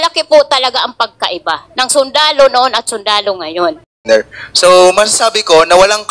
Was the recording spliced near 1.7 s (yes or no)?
no